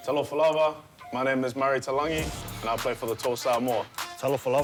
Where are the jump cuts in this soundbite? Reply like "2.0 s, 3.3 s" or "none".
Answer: none